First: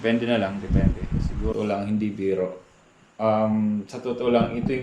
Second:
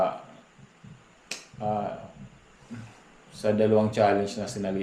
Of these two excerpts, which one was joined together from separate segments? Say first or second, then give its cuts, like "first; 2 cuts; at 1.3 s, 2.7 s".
first; 1 cut; at 1.5 s